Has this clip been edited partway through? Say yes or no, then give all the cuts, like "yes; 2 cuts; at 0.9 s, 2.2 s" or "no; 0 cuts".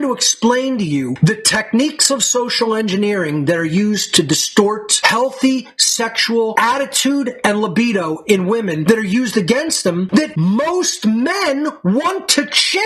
no; 0 cuts